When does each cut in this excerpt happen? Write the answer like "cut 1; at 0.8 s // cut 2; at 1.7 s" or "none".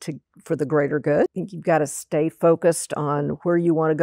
cut 1; at 1.4 s